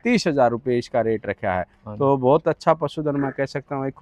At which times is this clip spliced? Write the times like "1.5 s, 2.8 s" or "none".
none